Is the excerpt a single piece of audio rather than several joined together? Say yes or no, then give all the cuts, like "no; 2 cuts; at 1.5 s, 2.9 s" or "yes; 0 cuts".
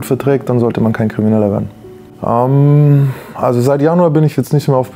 yes; 0 cuts